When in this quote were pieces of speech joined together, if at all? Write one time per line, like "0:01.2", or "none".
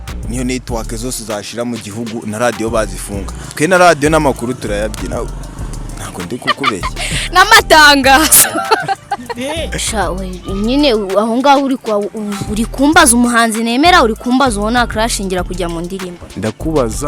0:09.8